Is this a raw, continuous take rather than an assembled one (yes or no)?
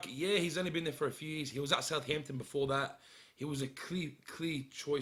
yes